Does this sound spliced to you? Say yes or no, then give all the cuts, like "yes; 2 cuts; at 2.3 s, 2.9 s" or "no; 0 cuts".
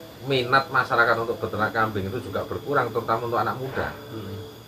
no; 0 cuts